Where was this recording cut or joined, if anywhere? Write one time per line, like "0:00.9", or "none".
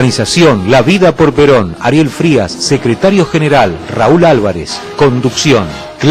none